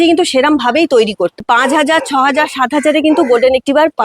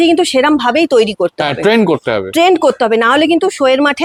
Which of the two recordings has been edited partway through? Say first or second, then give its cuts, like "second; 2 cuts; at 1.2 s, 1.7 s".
first; 1 cut; at 1.4 s